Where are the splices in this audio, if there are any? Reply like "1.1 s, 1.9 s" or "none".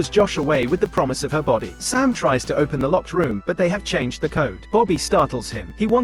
none